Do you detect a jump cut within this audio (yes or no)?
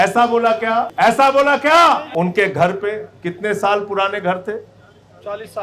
yes